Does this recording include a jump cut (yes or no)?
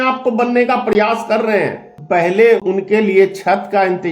yes